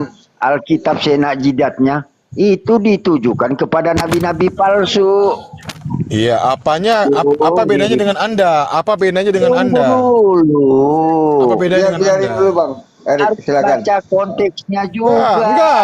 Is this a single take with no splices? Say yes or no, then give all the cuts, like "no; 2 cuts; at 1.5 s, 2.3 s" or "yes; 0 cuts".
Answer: yes; 0 cuts